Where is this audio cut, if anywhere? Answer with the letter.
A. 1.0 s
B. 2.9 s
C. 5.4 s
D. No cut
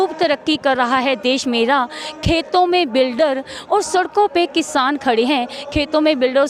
D